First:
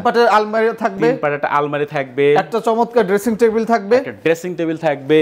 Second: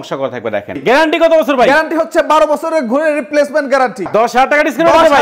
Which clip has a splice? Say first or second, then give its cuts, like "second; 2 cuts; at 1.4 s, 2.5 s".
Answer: second; 2 cuts; at 0.8 s, 4.0 s